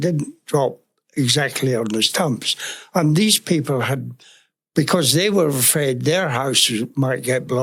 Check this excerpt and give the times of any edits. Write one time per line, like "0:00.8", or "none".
none